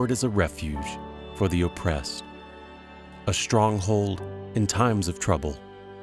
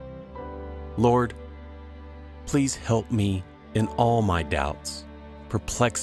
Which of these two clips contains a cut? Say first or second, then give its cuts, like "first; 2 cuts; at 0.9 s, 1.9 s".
second; 1 cut; at 0.9 s